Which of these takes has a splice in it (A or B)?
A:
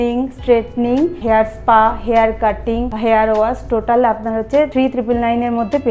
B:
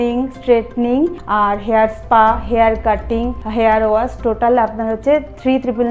A